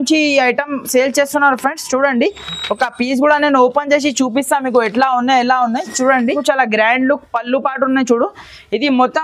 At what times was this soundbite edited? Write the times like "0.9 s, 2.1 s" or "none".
6.4 s

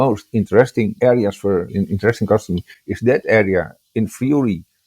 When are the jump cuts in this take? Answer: 0.9 s, 1.7 s

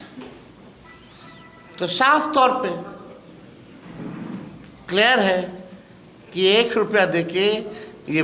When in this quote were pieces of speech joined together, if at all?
none

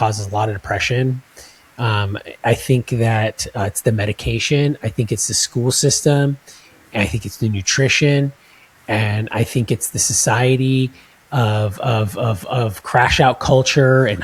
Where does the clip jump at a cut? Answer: none

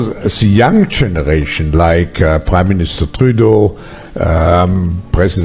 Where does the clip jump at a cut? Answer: none

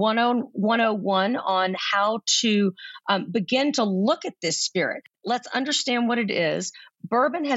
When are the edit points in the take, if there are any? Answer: 5.2 s

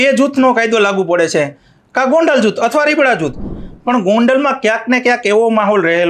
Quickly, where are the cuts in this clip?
3.5 s

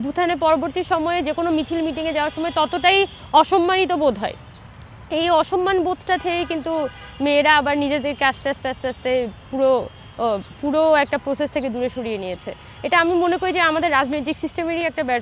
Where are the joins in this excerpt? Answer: none

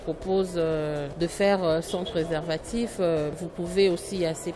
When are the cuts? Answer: 1.1 s, 3.3 s

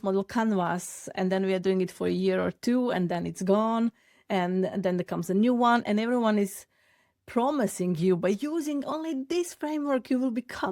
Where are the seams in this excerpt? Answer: 1.1 s

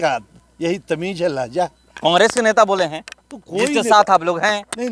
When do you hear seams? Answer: none

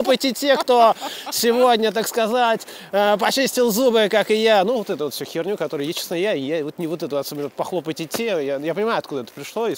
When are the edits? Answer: none

